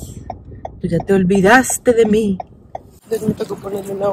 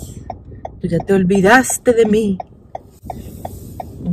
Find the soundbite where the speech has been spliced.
first; 1 cut; at 3.0 s

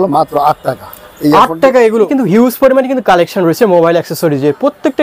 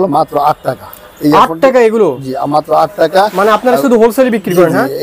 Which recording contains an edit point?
first; 1 cut; at 2.1 s

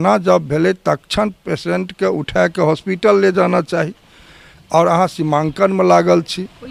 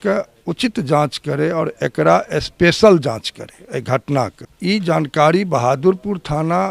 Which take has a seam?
second; 1 cut; at 4.5 s

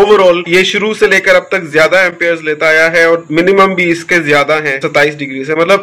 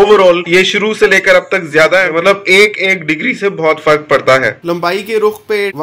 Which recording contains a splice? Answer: second; 2 cuts; at 2.1 s, 4.6 s

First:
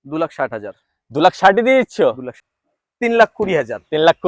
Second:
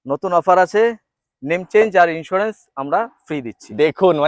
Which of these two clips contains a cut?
first; 1 cut; at 2.3 s

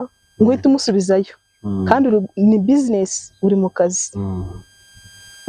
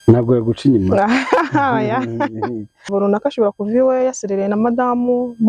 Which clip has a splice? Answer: second; 1 cut; at 2.9 s

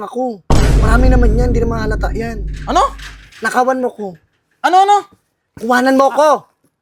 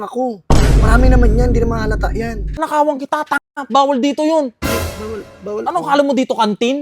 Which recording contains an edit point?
second; 1 cut; at 2.6 s

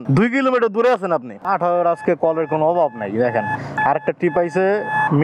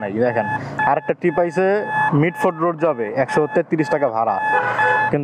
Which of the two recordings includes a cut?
first; 1 cut; at 1.3 s

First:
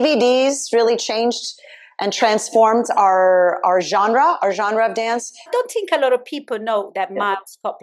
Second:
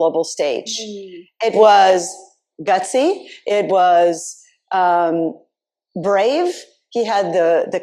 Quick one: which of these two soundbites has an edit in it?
first; 1 cut; at 5.4 s

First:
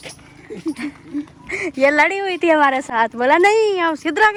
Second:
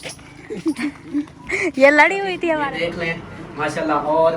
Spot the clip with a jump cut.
second; 1 cut; at 2.6 s

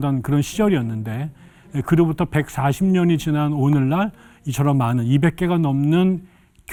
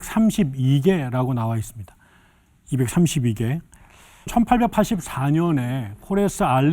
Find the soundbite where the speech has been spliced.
second; 1 cut; at 4.3 s

